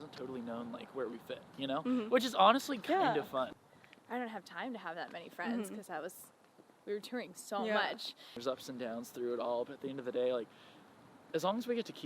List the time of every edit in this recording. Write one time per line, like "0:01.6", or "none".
0:03.5
0:08.4

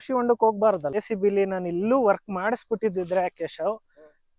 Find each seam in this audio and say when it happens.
0:00.9

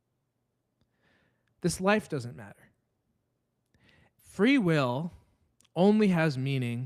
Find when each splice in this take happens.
0:04.2

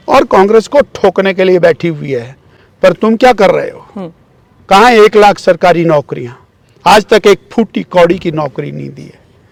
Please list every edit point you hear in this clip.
none

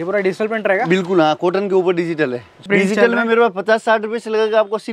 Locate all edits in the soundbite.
0:02.7

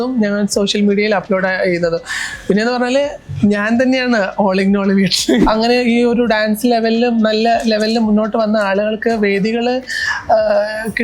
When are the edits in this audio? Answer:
0:05.4

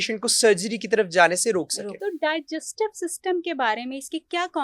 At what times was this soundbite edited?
0:02.0

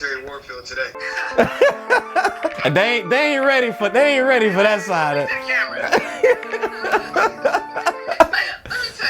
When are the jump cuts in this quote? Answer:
0:01.1
0:02.4

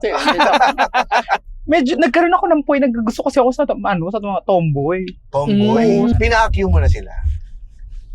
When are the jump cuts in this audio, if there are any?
0:01.5
0:06.1

